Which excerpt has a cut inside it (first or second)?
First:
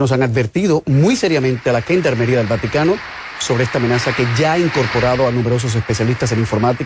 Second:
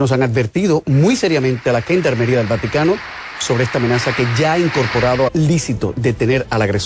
first